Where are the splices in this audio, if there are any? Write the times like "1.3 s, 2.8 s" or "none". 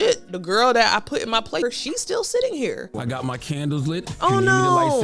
1.6 s, 2.9 s